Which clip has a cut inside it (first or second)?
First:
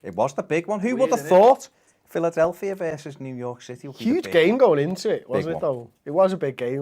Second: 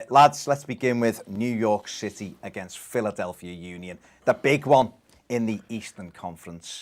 first